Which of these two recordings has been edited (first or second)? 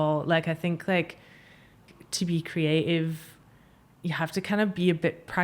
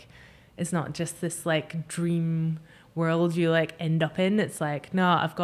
first